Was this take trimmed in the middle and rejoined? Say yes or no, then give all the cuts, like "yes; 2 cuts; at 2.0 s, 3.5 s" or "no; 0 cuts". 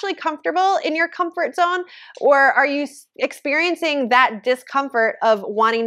no; 0 cuts